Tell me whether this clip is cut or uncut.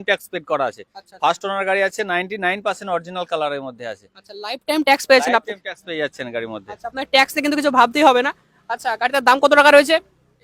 uncut